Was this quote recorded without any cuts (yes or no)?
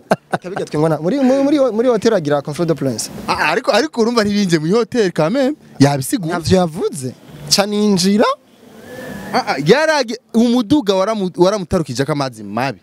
yes